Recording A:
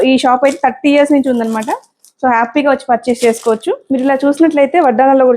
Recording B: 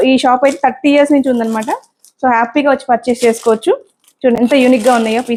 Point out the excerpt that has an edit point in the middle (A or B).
A